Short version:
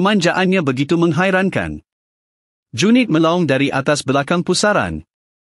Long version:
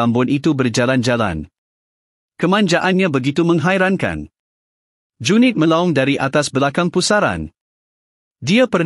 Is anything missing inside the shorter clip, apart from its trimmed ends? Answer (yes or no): no